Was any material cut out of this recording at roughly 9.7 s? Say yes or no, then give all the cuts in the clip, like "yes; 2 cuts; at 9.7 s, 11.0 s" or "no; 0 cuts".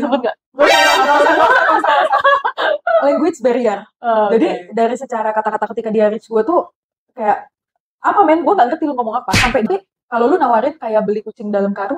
yes; 1 cut; at 9.7 s